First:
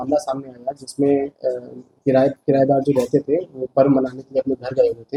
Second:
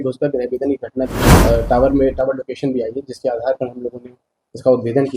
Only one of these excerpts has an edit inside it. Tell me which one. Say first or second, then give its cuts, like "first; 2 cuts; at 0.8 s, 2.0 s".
second; 1 cut; at 1.3 s